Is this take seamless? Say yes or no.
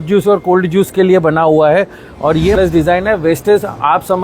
no